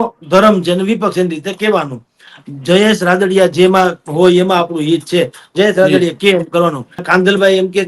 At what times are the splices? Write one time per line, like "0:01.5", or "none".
0:02.3
0:07.0